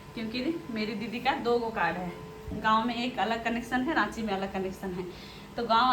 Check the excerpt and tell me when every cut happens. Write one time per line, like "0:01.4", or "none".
none